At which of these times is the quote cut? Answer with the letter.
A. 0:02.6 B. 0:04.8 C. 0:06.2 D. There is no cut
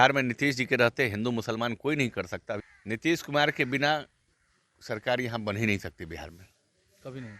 A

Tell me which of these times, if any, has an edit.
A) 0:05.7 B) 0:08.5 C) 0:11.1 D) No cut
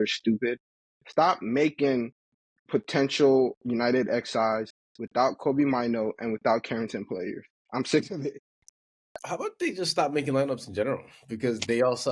B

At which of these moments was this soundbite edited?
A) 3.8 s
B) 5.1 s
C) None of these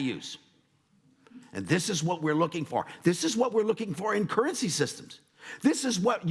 C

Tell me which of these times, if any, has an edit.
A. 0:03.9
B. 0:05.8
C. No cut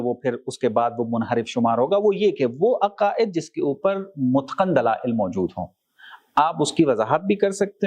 C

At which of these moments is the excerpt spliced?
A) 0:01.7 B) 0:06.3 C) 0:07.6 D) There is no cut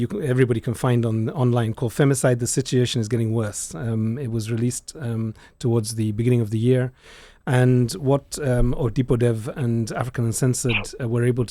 D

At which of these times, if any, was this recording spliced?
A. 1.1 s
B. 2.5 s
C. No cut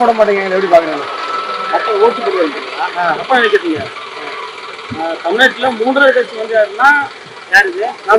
C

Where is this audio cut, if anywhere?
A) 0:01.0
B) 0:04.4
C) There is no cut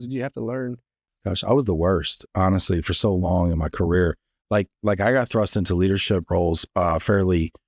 A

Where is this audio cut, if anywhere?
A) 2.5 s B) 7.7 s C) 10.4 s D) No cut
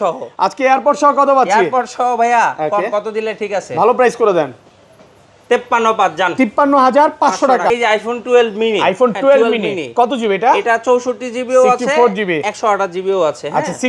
B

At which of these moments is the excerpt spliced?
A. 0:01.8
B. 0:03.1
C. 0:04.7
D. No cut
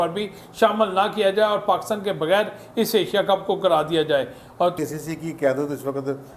C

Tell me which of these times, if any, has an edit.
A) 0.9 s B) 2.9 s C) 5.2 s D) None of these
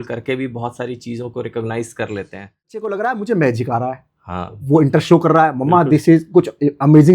B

